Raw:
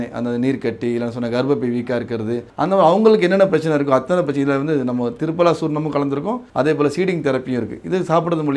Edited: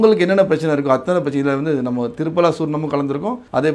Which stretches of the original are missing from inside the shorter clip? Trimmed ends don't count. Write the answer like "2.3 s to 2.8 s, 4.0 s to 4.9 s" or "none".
none